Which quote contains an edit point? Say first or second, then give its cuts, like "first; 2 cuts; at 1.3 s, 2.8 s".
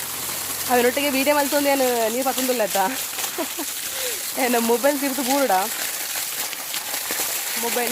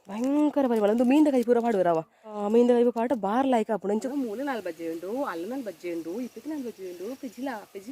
second; 2 cuts; at 2.4 s, 4.0 s